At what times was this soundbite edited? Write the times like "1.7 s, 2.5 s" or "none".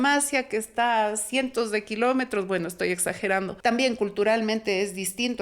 3.5 s